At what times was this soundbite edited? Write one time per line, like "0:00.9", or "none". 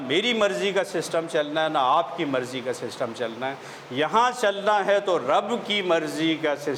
none